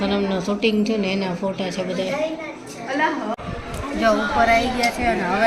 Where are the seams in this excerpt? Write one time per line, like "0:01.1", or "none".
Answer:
0:03.3